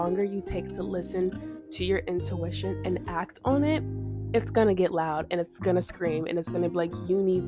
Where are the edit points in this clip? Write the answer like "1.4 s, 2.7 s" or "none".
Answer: none